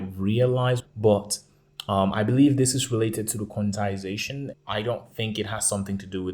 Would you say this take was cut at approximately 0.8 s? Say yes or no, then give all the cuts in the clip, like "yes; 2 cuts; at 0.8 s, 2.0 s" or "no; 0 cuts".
yes; 2 cuts; at 0.8 s, 4.5 s